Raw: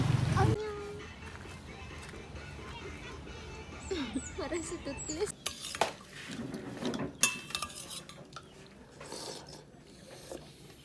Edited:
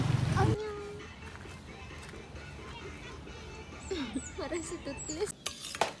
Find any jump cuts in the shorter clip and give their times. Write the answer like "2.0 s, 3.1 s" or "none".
none